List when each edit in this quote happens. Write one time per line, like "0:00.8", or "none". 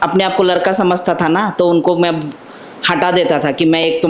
none